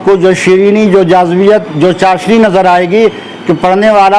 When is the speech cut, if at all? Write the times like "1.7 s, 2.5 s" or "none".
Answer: none